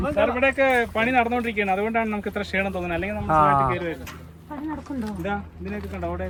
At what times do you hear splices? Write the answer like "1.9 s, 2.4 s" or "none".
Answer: none